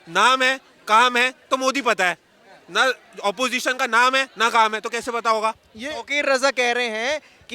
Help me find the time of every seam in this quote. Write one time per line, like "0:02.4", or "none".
0:05.7

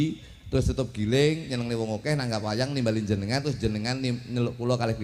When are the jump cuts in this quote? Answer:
none

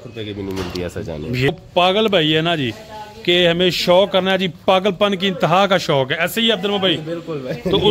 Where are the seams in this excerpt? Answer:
0:01.5

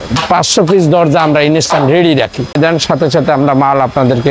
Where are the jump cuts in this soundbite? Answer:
0:02.5

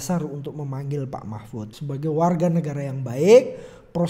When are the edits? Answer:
0:01.7

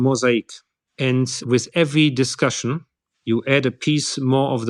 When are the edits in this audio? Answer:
none

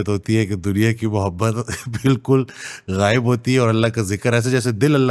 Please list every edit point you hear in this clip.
none

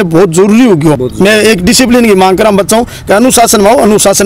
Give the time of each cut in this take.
0:01.1

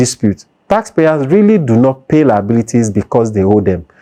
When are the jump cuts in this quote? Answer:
none

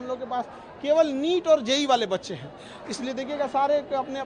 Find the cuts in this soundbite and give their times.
none

